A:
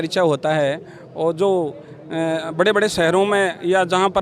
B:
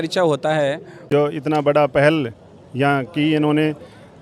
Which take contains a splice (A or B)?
B